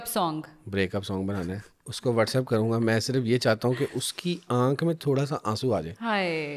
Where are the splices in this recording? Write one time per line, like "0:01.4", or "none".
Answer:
none